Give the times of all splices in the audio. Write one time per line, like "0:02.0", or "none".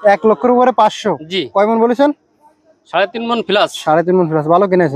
none

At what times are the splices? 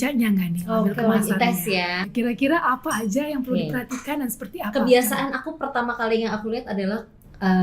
0:02.1

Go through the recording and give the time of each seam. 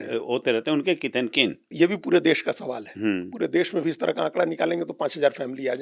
0:01.7

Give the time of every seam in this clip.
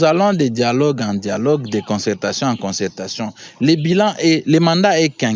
none

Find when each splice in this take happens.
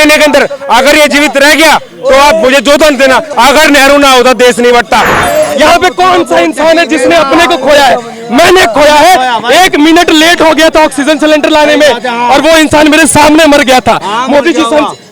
0:03.3
0:05.2

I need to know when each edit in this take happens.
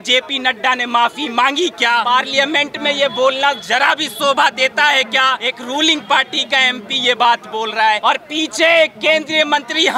0:02.0
0:05.5
0:08.0

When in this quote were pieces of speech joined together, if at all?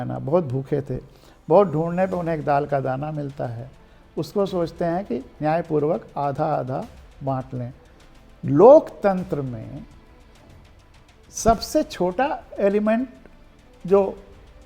0:07.9

